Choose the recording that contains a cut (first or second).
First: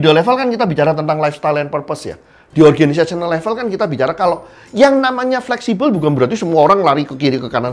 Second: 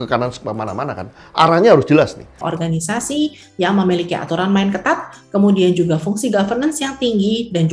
second